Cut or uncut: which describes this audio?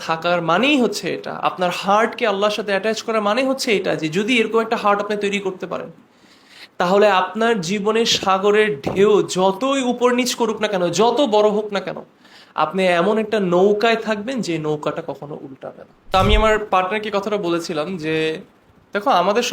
cut